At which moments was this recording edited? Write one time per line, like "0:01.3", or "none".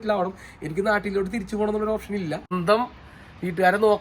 0:02.5

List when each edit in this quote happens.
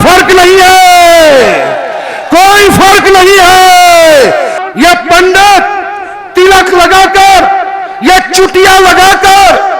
0:04.6

